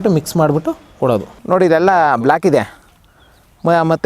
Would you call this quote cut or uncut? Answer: cut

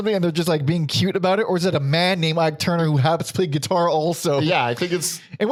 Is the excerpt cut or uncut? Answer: uncut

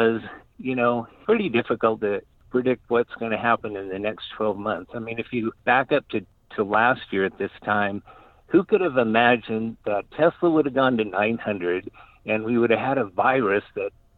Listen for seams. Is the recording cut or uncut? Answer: uncut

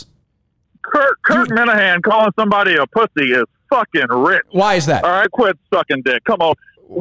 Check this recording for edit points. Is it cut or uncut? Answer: cut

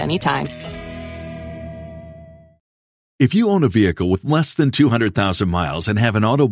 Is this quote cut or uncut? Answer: uncut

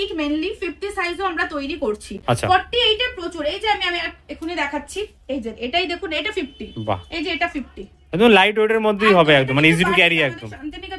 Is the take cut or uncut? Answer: uncut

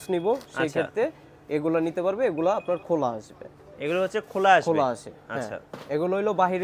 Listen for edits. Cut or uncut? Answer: uncut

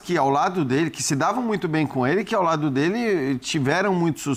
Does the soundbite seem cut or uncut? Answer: uncut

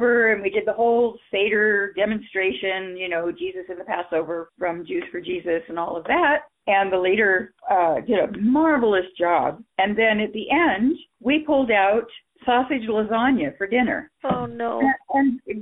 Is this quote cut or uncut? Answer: cut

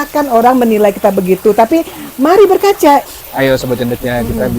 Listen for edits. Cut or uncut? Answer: cut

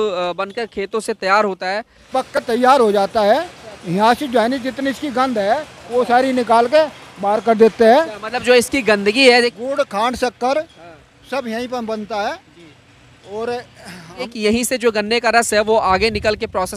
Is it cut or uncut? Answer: cut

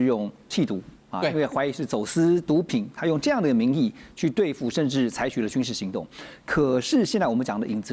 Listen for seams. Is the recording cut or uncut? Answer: uncut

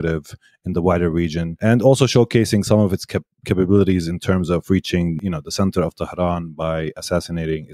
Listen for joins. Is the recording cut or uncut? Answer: cut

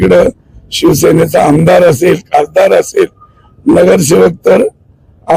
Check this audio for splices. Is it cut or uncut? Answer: uncut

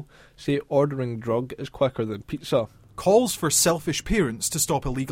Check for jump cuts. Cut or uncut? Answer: cut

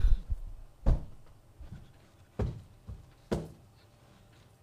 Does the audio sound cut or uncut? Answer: uncut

